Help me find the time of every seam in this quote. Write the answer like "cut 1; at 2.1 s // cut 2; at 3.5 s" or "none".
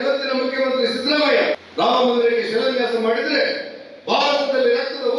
cut 1; at 1.6 s